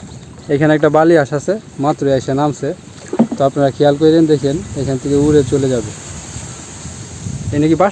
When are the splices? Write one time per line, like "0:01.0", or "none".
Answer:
none